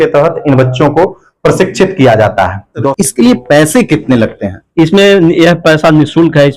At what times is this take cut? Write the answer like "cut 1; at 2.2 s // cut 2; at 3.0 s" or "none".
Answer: cut 1; at 2.9 s

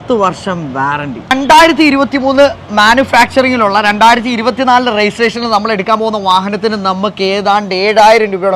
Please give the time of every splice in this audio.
cut 1; at 1.2 s

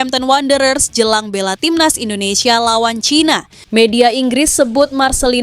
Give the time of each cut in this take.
cut 1; at 3.5 s

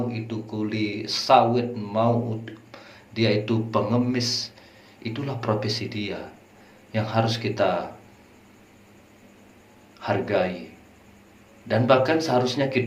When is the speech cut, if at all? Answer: none

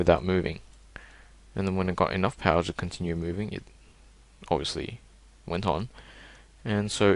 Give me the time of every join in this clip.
cut 1; at 5.3 s

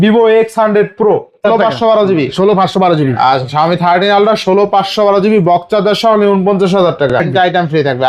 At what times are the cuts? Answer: cut 1; at 1.4 s // cut 2; at 7.2 s

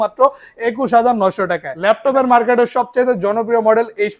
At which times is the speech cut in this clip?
cut 1; at 1.7 s

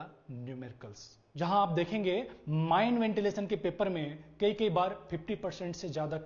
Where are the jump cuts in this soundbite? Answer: none

